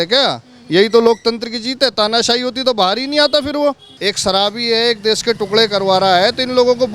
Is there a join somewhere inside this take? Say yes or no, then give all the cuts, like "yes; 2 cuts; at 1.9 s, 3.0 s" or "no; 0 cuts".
yes; 1 cut; at 3.9 s